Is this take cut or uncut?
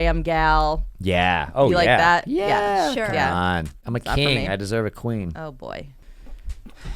cut